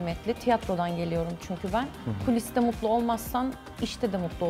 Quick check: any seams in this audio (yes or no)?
no